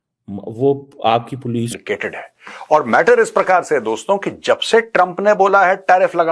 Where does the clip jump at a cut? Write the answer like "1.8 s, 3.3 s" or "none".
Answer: 1.7 s